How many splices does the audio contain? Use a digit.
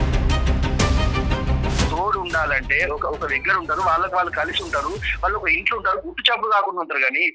1